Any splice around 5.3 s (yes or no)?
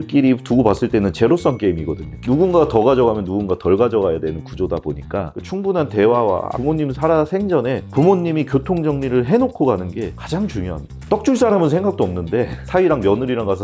yes